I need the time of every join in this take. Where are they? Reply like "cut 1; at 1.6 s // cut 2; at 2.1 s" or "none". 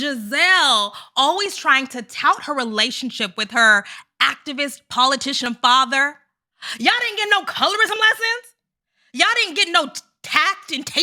none

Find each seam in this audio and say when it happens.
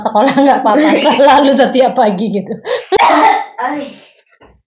cut 1; at 3.0 s

